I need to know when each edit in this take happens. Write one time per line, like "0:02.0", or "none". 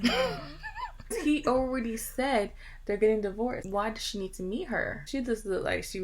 0:01.0
0:03.6
0:05.1